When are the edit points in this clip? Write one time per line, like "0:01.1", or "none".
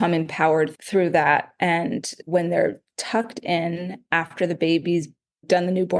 0:02.1

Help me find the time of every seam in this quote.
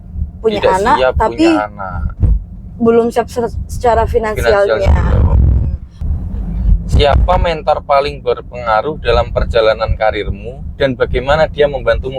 0:05.9

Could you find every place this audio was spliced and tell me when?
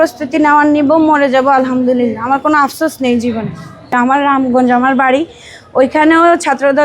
0:03.7

